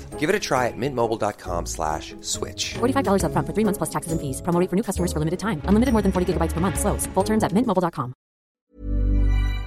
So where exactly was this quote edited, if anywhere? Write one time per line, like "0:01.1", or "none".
0:08.6